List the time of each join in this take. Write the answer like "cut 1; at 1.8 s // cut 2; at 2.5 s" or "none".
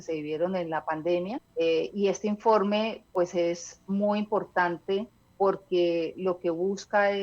cut 1; at 1.4 s // cut 2; at 5.2 s